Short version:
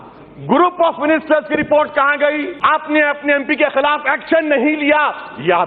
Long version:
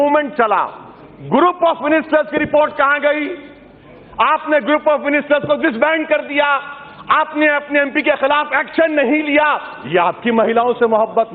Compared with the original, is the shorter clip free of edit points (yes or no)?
no